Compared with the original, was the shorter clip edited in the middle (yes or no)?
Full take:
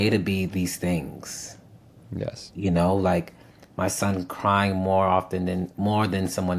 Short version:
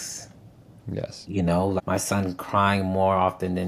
yes